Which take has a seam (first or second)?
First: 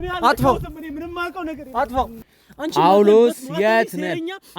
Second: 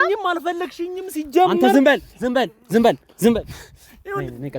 first